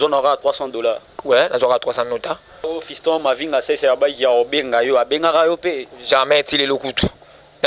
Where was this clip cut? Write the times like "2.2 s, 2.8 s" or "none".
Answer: 2.7 s